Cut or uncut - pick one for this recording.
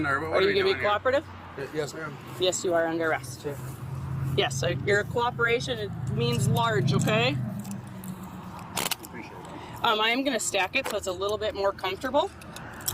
uncut